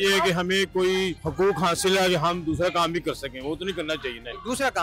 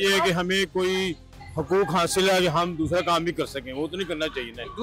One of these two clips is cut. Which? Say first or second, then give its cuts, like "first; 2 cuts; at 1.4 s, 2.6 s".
first; 1 cut; at 1.2 s